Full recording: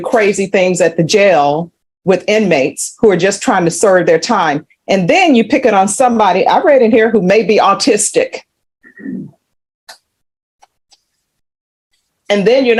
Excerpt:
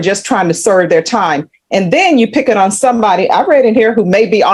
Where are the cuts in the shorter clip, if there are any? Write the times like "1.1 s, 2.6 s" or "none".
none